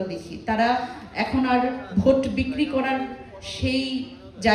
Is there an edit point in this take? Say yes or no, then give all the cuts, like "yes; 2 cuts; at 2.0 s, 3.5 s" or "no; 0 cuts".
no; 0 cuts